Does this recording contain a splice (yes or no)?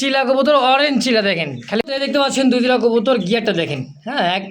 yes